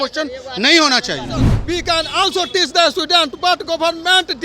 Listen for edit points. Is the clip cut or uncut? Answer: cut